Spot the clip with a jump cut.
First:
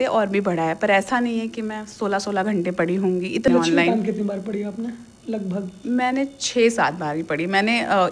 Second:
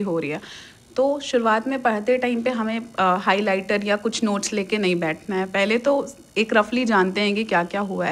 first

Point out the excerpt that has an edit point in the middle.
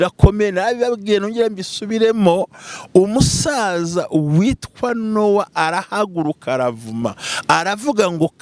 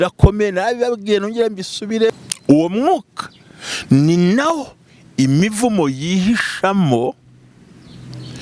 second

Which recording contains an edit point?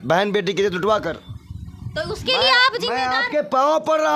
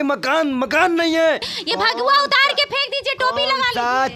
second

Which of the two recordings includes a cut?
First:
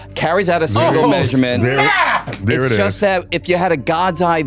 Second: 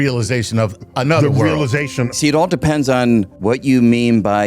second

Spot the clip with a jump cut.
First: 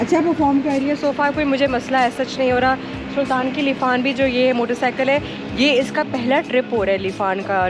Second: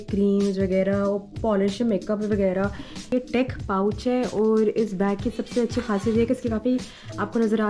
second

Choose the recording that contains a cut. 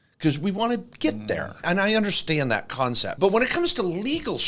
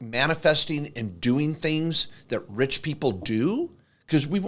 first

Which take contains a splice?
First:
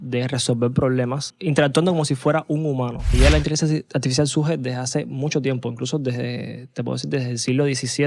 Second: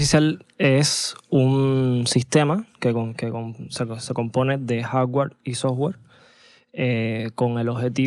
first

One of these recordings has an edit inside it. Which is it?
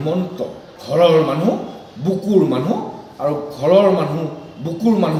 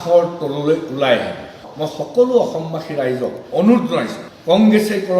second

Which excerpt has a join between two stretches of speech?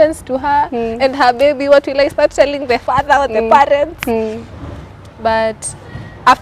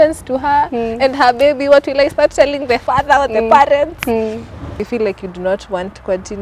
second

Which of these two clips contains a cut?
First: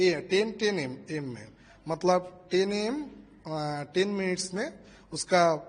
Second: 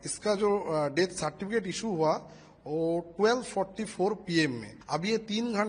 second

